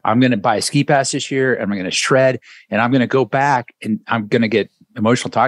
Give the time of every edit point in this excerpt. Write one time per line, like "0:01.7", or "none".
none